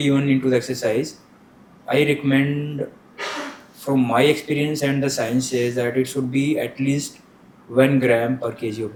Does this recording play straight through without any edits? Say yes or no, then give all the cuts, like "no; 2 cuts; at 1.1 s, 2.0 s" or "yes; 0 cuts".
yes; 0 cuts